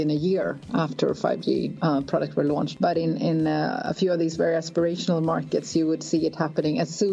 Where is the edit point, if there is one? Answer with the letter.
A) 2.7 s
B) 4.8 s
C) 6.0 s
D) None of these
A